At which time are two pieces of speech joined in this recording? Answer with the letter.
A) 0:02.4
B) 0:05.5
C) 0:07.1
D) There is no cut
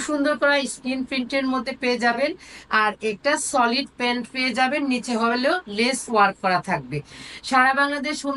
D